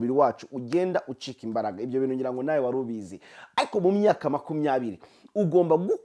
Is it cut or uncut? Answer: uncut